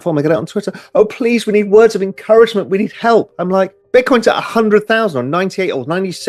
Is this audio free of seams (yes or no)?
no